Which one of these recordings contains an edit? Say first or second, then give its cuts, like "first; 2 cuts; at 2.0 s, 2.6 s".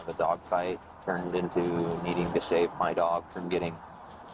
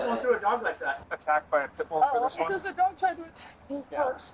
second; 2 cuts; at 1.0 s, 2.0 s